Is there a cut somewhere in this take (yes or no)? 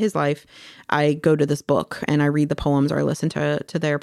no